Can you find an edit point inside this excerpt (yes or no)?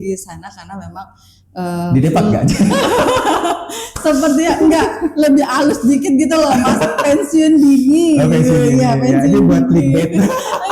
no